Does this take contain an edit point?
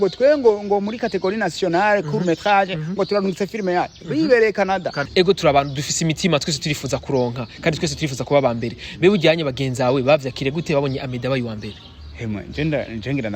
yes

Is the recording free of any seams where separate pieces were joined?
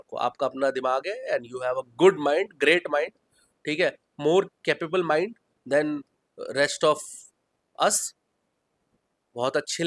yes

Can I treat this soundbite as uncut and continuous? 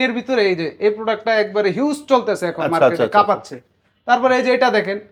yes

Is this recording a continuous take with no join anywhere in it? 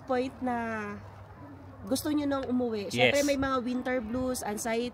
yes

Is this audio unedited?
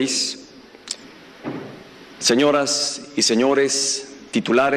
yes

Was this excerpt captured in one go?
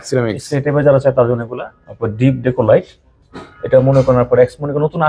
yes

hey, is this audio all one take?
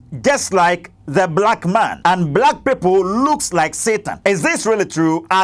no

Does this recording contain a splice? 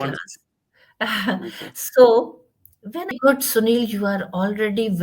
yes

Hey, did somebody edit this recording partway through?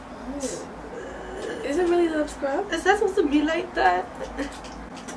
no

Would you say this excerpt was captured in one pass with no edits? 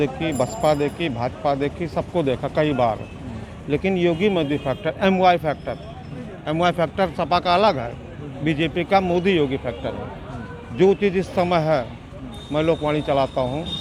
yes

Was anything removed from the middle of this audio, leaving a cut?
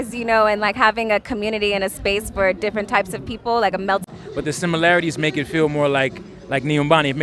yes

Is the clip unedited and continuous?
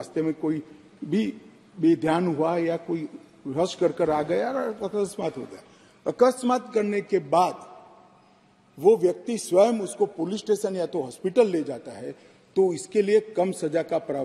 yes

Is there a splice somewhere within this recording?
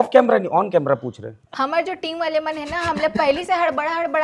yes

